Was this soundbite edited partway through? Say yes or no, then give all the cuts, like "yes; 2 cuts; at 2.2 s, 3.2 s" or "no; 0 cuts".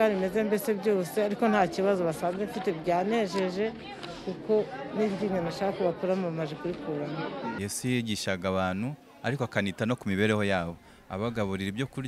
yes; 1 cut; at 7.6 s